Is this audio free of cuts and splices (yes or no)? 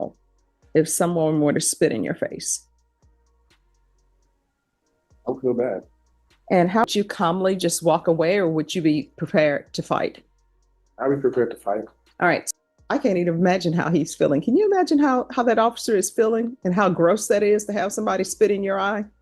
no